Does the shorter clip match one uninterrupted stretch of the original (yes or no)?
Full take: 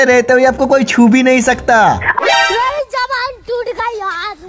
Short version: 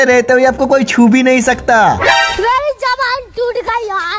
no